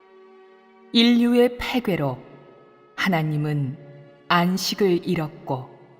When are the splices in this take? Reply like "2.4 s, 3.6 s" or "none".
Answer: 2.2 s